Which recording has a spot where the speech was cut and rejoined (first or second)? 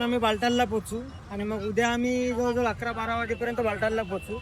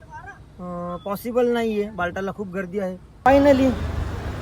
second